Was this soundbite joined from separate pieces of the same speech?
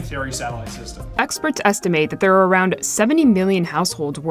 yes; 1 cut; at 1.0 s

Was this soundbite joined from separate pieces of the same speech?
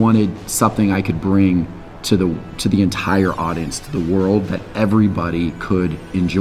no; 0 cuts

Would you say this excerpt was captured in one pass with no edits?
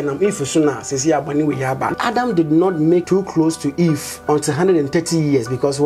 no; 3 cuts; at 1.9 s, 3.0 s, 4.1 s

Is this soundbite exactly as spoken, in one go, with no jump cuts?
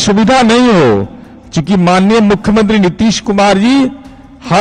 yes; 0 cuts

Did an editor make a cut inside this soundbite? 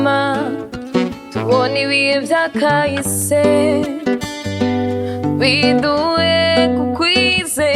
no; 0 cuts

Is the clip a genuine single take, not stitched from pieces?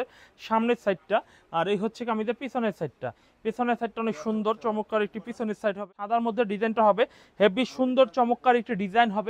no; 1 cut; at 5.9 s

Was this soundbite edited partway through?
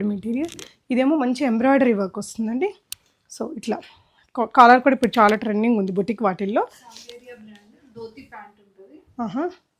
no; 0 cuts

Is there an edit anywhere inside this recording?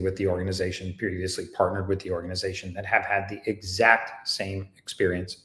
no; 0 cuts

